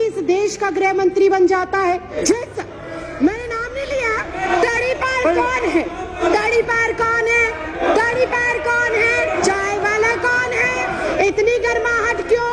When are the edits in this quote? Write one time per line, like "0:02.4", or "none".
0:02.1
0:04.4
0:06.2
0:07.8
0:09.4
0:11.0